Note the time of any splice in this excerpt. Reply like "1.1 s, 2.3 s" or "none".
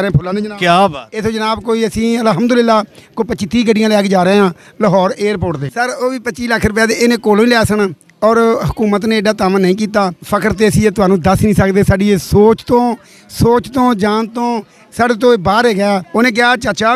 5.7 s, 10.2 s, 16.1 s